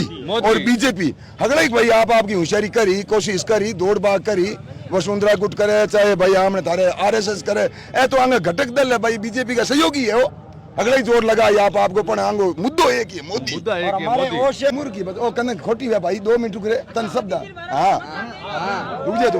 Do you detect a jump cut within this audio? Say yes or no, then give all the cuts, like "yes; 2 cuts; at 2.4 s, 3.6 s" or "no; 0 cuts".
yes; 1 cut; at 14.7 s